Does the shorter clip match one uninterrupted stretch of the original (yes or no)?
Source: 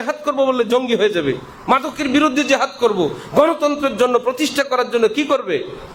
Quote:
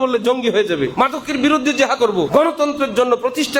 no